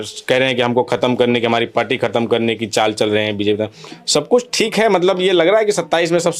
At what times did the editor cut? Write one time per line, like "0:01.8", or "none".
none